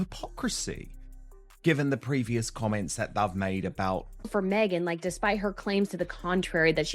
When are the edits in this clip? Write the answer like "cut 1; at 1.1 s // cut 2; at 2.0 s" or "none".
cut 1; at 4.1 s